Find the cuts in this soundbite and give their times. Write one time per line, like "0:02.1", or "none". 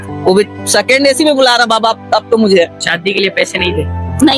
0:02.8